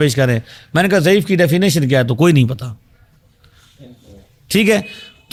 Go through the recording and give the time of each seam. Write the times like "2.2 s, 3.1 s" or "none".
none